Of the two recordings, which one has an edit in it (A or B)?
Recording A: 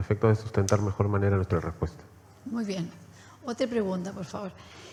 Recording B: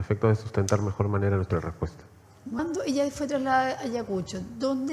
B